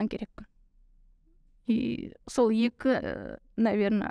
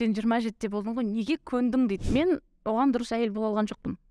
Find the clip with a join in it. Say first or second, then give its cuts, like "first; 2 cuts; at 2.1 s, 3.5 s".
second; 1 cut; at 2.0 s